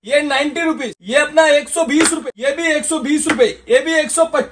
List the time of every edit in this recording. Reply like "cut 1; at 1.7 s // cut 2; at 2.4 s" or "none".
cut 1; at 0.9 s // cut 2; at 2.2 s